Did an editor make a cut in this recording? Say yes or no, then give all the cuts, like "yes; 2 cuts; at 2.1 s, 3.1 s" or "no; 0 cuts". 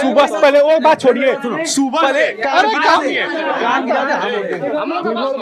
no; 0 cuts